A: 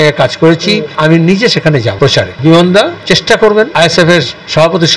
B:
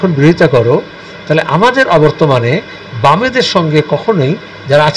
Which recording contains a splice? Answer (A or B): A